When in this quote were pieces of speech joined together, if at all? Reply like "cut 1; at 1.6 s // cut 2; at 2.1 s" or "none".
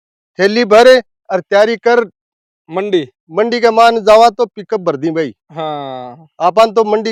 none